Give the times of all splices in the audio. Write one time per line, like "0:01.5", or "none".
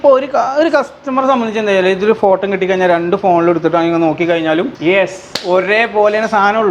0:04.7